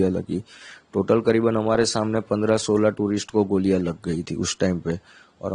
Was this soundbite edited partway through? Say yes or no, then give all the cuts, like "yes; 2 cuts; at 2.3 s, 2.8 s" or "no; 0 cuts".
no; 0 cuts